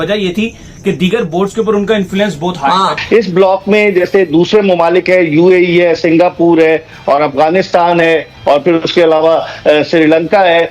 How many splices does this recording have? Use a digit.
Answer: 1